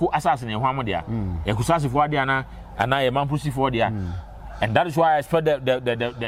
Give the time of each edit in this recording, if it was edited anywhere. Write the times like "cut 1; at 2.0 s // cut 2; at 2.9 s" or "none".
none